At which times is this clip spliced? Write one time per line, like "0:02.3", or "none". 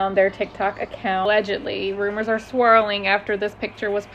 0:01.2